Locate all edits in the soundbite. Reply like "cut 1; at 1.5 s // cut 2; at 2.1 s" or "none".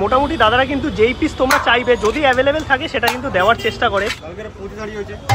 cut 1; at 4.3 s